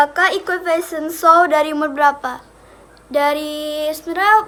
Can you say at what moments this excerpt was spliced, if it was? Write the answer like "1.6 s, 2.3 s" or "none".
none